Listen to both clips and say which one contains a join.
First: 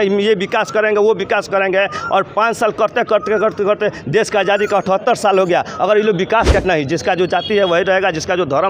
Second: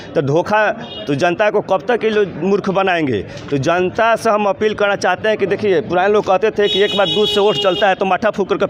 first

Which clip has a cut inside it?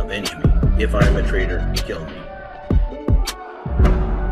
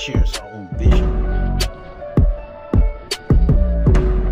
first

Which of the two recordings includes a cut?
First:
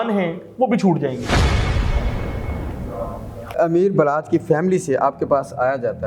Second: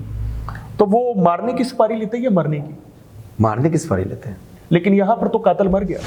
first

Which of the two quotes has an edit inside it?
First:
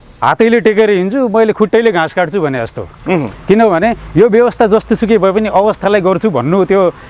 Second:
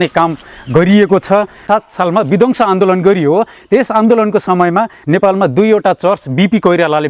second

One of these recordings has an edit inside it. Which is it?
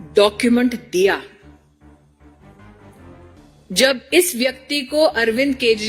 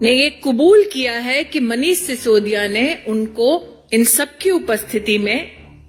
first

